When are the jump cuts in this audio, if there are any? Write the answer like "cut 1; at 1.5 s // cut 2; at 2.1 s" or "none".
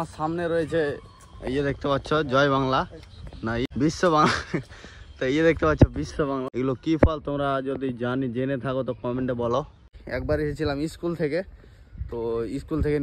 cut 1; at 3.7 s // cut 2; at 6.5 s // cut 3; at 10.0 s